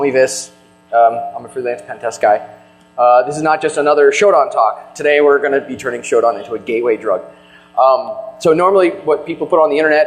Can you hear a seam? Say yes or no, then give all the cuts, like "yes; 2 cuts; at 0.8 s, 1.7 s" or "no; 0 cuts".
no; 0 cuts